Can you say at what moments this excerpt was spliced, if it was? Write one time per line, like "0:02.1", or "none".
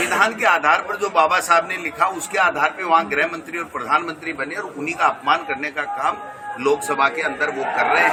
none